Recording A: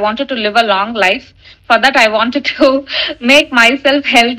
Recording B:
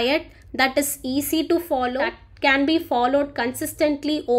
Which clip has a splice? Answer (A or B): B